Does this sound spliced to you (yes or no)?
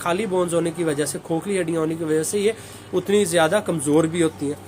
no